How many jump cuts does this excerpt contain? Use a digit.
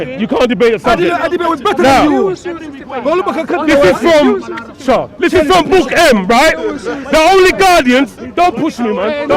0